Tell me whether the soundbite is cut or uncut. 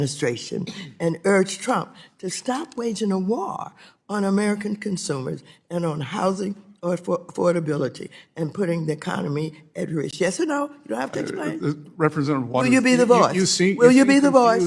uncut